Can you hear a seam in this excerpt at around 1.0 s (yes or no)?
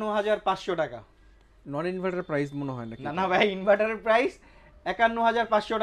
no